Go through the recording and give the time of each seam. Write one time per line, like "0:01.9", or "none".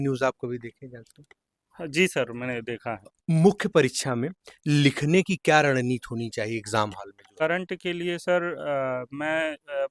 0:03.1
0:07.4